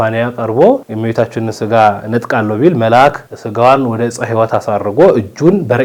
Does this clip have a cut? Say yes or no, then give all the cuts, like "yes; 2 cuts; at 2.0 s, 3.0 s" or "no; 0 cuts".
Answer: no; 0 cuts